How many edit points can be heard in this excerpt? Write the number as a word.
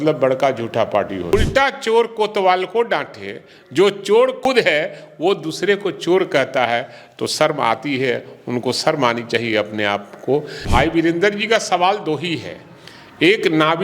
three